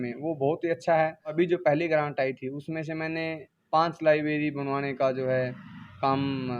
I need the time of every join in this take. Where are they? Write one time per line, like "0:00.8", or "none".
0:01.3